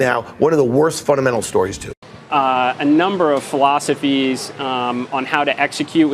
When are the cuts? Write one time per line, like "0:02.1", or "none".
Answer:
0:02.0